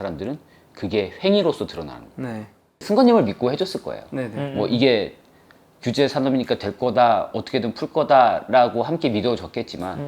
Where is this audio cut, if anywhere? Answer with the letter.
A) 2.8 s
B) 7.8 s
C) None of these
A